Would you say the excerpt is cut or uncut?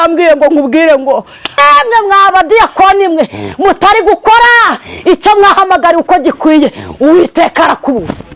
cut